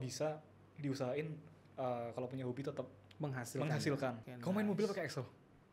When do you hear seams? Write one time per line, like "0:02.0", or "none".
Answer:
0:04.3